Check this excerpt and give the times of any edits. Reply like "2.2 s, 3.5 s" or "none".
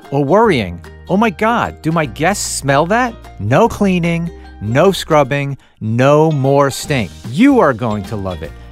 3.3 s, 7.2 s